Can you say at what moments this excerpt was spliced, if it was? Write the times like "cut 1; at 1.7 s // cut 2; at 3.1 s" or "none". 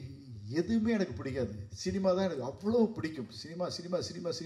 none